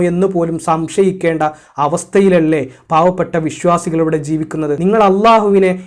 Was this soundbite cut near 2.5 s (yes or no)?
no